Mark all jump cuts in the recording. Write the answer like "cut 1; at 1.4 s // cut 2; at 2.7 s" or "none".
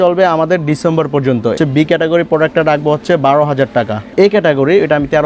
cut 1; at 1.5 s // cut 2; at 4.1 s